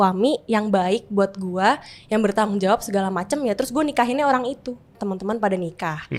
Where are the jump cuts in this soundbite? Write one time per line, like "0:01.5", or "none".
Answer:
0:05.1